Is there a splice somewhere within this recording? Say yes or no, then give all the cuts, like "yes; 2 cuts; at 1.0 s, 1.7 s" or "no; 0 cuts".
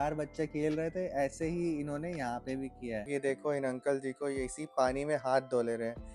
yes; 1 cut; at 3.1 s